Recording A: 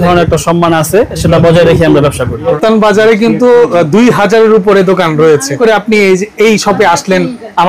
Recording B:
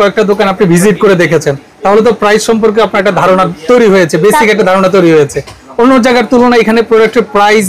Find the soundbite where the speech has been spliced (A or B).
A